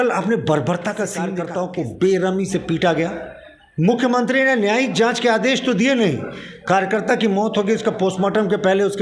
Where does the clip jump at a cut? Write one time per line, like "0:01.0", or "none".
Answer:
0:01.3